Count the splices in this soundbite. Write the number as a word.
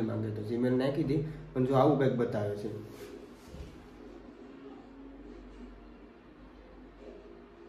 zero